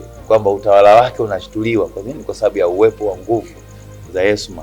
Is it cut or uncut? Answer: uncut